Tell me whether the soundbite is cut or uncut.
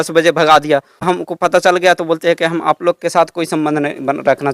cut